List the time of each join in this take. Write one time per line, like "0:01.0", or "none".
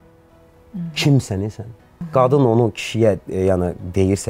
0:01.9

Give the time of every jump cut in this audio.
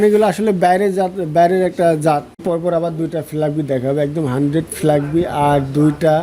0:02.8

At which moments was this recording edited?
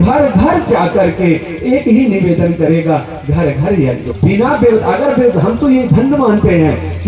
0:04.1

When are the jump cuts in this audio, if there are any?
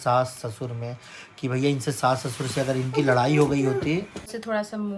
0:04.0

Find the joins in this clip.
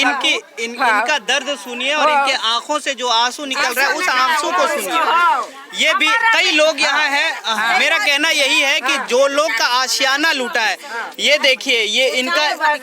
none

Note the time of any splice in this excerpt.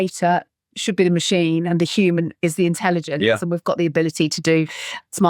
none

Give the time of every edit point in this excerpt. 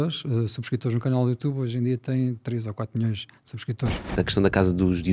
0:04.2

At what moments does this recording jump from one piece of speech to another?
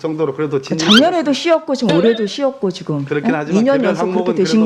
none

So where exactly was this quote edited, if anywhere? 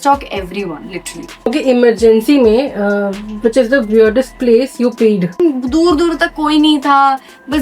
0:01.2
0:05.4

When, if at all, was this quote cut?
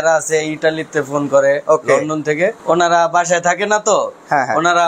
0:02.6

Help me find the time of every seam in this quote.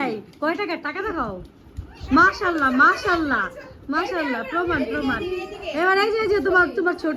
none

